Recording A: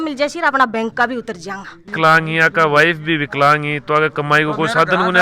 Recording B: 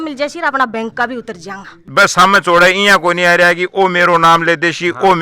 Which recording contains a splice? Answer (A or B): B